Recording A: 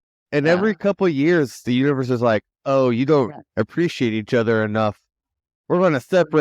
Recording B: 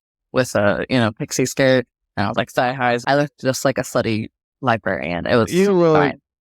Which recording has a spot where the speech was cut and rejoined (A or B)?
B